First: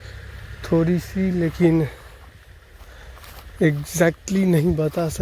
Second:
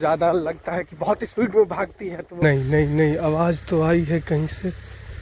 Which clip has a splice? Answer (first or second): second